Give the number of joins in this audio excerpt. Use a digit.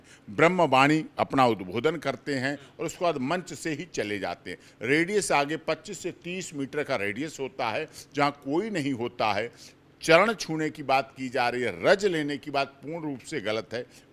0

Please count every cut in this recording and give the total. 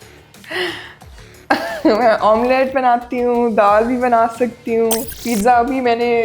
1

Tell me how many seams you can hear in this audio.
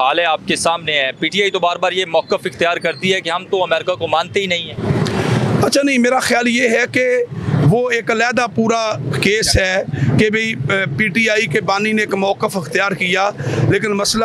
0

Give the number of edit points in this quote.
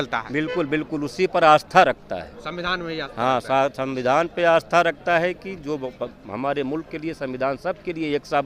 0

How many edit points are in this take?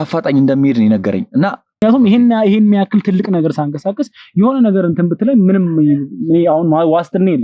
1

